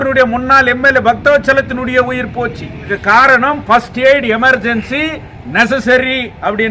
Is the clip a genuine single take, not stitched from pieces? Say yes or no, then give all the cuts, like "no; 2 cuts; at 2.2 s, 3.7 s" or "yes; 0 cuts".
no; 1 cut; at 2.9 s